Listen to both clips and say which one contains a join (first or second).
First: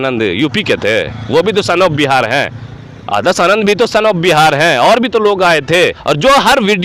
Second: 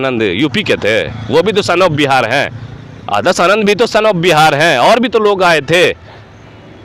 first